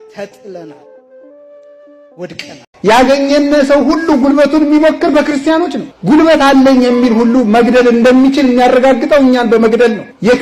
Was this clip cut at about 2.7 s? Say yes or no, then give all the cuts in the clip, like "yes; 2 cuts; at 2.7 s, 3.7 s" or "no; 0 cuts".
yes; 1 cut; at 2.7 s